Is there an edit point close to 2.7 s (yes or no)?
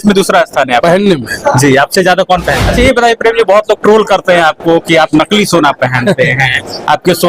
yes